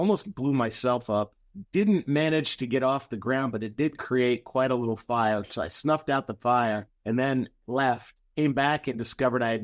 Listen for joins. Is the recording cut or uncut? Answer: uncut